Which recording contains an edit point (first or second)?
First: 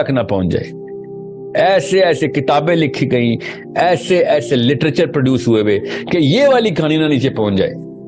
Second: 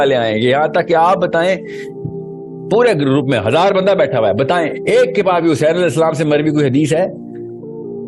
second